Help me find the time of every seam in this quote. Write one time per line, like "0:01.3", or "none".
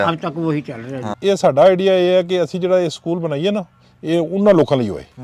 0:01.1